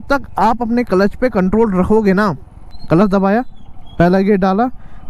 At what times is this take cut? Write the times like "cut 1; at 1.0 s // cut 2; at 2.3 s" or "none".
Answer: cut 1; at 2.7 s